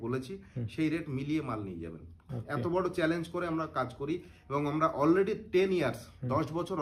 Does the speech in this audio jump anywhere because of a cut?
no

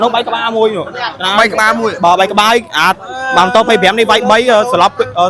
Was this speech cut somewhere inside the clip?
no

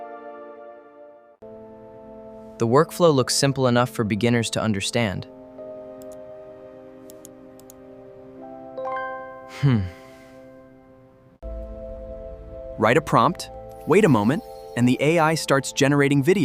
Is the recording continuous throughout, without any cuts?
no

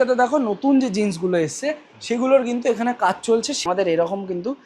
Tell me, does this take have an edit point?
yes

